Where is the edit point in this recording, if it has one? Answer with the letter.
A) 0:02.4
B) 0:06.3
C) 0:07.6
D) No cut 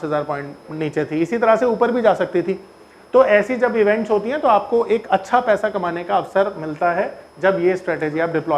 B